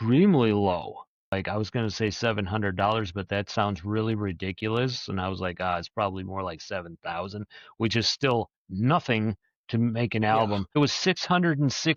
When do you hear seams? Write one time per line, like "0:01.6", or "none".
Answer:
0:01.3